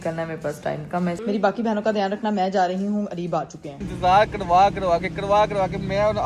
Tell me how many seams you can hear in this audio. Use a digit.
2